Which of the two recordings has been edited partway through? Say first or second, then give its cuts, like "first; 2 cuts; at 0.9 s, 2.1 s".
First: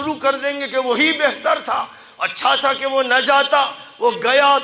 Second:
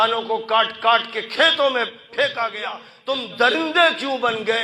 second; 1 cut; at 2.9 s